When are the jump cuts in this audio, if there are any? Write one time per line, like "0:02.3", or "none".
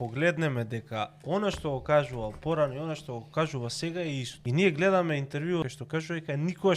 0:04.3
0:05.7